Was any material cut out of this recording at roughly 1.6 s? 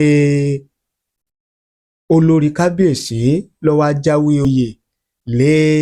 no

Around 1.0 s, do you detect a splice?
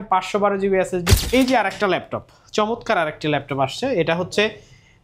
yes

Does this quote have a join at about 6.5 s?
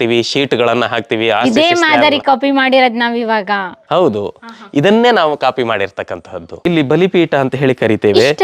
yes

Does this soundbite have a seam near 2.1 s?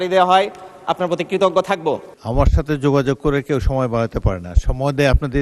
yes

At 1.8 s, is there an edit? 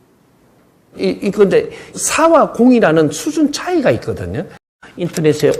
no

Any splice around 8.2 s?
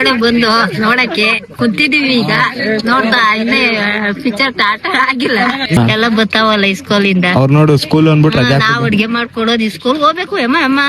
no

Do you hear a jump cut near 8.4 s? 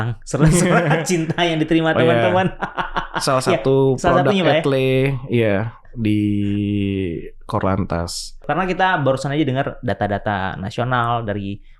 yes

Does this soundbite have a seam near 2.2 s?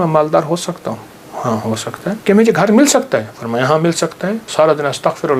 yes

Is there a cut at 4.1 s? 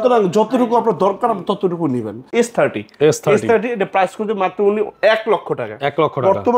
no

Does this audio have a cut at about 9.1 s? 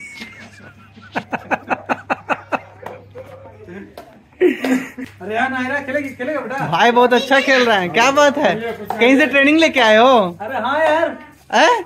no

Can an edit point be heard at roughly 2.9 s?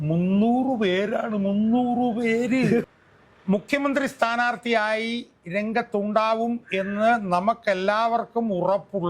yes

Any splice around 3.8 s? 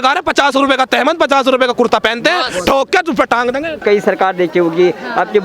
yes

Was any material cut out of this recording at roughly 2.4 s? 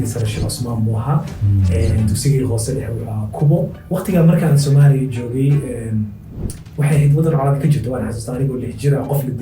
no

